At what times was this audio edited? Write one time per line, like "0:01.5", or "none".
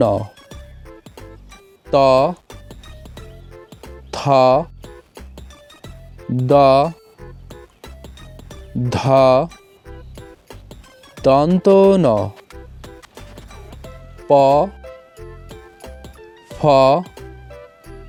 none